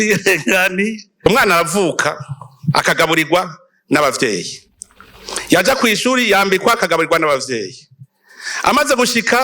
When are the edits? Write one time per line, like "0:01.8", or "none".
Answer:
0:01.3